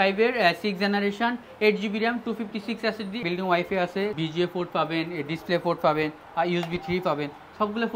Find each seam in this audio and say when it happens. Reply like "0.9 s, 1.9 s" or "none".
3.2 s, 4.1 s

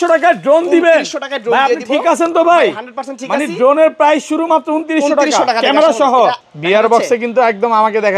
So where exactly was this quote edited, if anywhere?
6.4 s

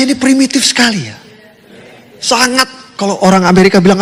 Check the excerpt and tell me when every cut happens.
none

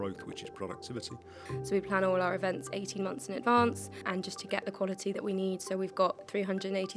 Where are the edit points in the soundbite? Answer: 1.5 s, 4.0 s

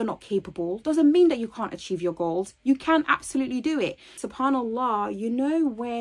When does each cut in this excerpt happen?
4.2 s

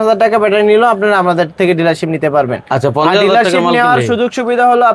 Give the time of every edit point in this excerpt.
none

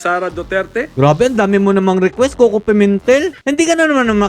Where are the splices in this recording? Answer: 0.9 s, 3.4 s

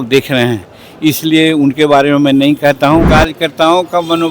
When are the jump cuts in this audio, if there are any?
3.1 s

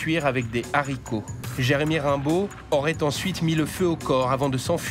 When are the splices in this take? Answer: 1.4 s

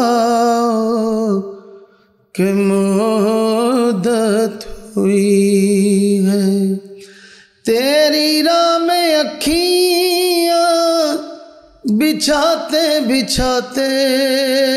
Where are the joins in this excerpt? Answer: none

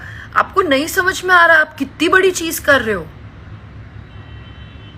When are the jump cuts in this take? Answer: none

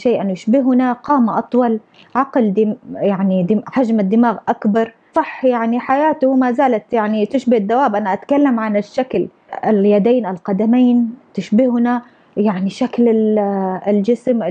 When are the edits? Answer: none

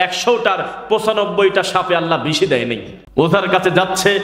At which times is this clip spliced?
2.9 s

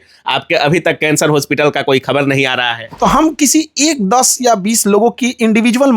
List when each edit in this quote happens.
2.8 s

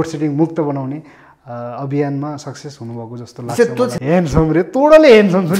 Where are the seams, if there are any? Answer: 4.0 s

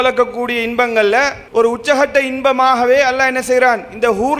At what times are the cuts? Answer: 1.4 s

